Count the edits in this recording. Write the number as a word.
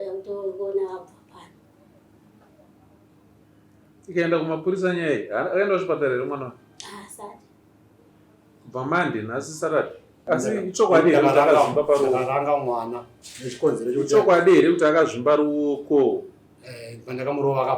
one